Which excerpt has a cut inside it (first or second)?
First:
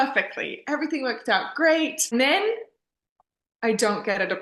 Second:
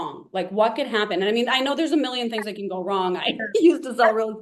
first